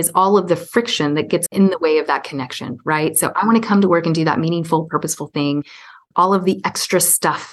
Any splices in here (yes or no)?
yes